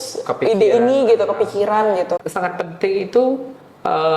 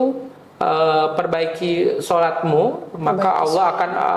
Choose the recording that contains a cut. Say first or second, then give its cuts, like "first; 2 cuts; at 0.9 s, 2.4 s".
first; 1 cut; at 2.3 s